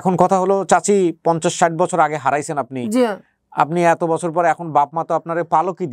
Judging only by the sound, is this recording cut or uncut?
uncut